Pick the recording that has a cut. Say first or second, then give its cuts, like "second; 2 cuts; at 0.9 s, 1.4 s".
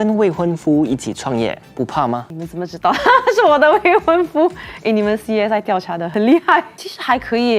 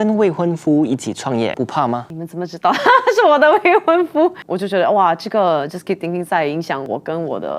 second; 3 cuts; at 1.5 s, 4.5 s, 6.8 s